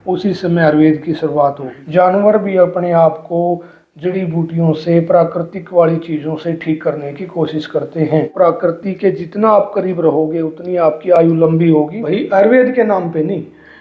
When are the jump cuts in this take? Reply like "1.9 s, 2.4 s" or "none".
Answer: 1.8 s, 8.3 s, 12.0 s